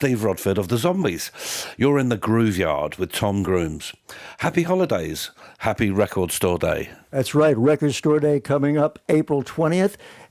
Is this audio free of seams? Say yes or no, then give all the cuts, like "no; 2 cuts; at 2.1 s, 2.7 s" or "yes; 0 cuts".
yes; 0 cuts